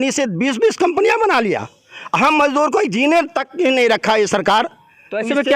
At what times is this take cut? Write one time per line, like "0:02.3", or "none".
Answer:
none